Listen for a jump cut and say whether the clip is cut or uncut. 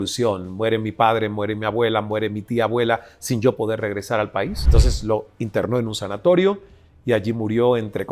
cut